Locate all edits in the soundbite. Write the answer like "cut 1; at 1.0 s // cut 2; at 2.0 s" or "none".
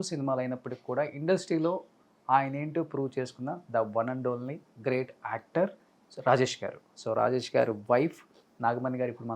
cut 1; at 7.0 s